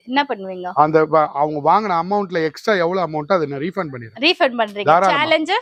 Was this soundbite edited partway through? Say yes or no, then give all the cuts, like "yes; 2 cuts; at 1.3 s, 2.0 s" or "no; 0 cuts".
no; 0 cuts